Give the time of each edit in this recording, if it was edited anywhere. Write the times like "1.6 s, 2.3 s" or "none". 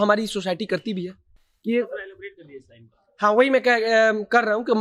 none